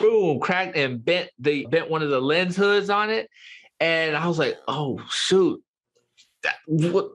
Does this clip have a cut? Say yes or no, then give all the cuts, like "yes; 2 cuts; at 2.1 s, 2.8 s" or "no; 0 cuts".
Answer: no; 0 cuts